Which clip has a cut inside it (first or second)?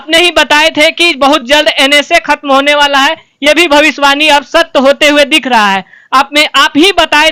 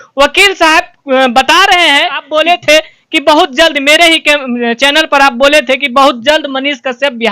second